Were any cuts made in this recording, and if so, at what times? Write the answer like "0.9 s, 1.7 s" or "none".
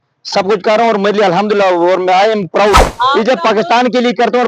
2.9 s